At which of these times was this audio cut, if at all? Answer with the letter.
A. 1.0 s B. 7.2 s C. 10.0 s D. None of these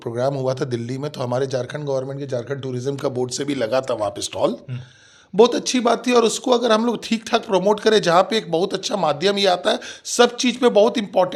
D